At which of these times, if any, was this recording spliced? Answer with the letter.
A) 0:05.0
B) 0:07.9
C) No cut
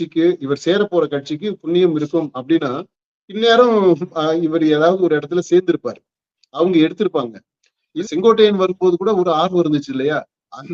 B